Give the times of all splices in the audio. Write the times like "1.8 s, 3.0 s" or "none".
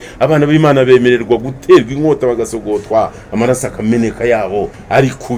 none